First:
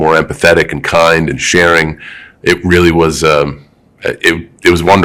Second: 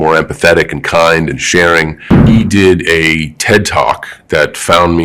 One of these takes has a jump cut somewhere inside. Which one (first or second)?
second